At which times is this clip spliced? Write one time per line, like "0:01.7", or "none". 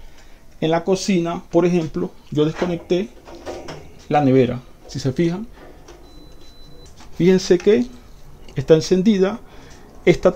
none